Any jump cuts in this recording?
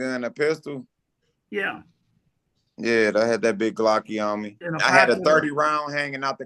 yes; 1 cut; at 4.6 s

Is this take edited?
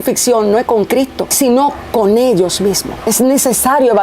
yes; 2 cuts; at 1.2 s, 3.0 s

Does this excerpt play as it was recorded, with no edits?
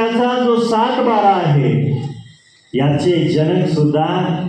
yes; 0 cuts

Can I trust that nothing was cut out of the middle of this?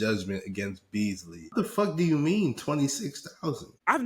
no; 1 cut; at 1.5 s

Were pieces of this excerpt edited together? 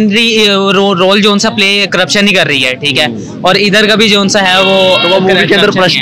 no; 0 cuts

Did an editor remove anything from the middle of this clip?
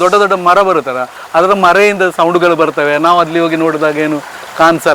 no; 0 cuts

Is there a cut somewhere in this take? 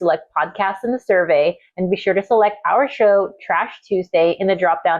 no; 0 cuts

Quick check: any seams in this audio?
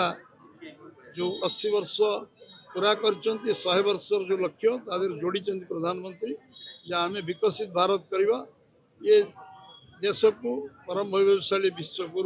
no; 0 cuts

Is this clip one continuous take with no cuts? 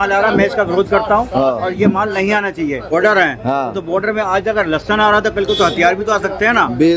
no; 1 cut; at 2.9 s

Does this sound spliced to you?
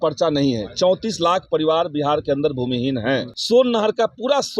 yes; 1 cut; at 3.3 s

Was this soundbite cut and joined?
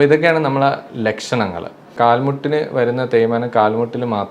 yes; 1 cut; at 2.0 s

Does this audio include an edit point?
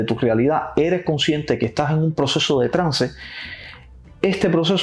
no; 0 cuts

